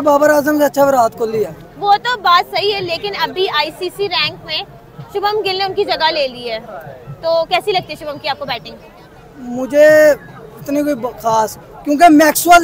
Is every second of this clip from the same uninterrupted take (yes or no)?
yes